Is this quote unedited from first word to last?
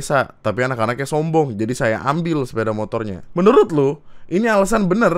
no; 1 cut; at 3.2 s

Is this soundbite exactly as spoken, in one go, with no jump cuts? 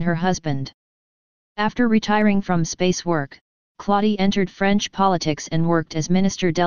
no; 1 cut; at 1.2 s

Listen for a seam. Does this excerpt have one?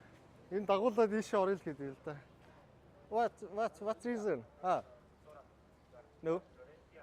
no; 0 cuts

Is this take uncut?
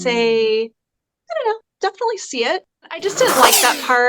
no; 1 cut; at 3.0 s

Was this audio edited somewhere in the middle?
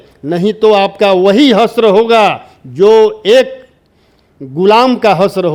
no; 0 cuts

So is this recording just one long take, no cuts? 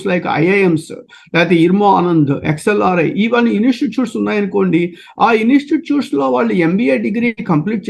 yes; 0 cuts

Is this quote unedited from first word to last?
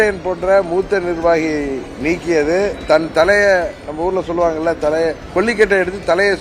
yes; 0 cuts

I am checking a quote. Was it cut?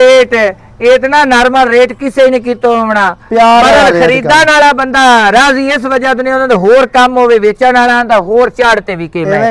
no; 0 cuts

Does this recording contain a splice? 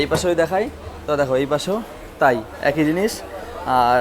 no; 0 cuts

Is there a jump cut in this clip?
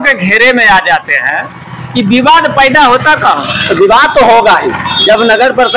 no; 0 cuts

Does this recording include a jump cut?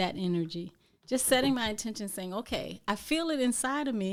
no; 0 cuts

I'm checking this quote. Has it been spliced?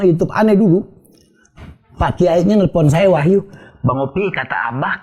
no; 0 cuts

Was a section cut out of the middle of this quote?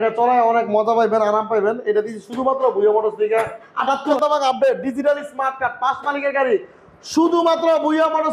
yes; 1 cut; at 4.1 s

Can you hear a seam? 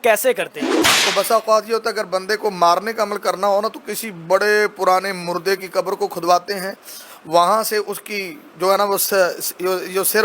yes; 1 cut; at 0.9 s

